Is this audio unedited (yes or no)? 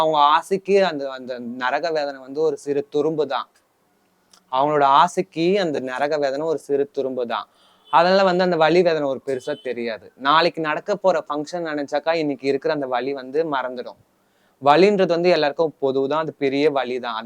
yes